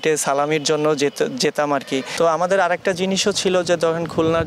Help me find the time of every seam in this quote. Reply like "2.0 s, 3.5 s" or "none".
2.1 s